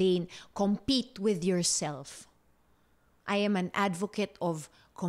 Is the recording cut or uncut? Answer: uncut